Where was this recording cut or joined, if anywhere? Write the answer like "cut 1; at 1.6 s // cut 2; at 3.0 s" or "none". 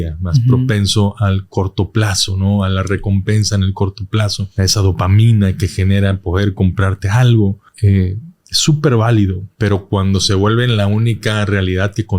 cut 1; at 4.4 s // cut 2; at 7.7 s // cut 3; at 9.4 s